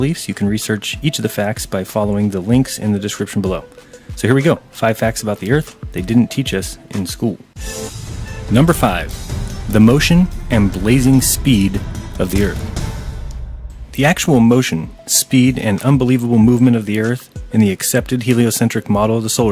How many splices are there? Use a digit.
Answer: 1